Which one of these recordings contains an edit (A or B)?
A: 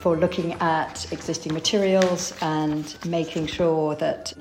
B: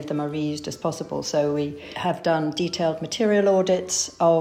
B